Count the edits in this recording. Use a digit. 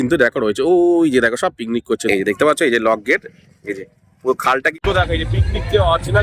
2